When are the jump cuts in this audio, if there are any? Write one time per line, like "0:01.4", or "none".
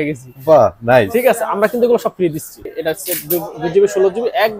0:02.6